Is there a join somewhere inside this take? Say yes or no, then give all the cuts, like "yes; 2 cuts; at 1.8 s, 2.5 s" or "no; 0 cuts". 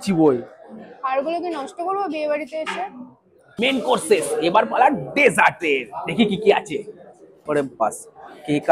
no; 0 cuts